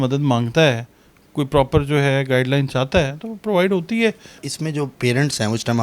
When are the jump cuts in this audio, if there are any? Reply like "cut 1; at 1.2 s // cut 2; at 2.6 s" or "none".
cut 1; at 4.4 s